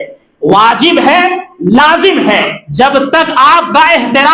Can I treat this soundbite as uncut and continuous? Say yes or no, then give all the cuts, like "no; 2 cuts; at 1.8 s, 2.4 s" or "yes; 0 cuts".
no; 1 cut; at 2.6 s